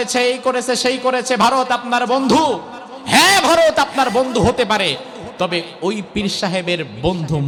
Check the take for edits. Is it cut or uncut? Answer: uncut